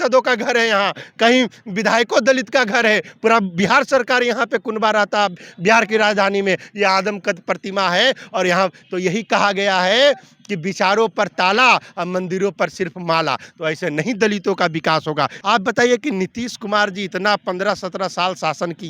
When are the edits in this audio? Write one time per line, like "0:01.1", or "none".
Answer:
0:15.4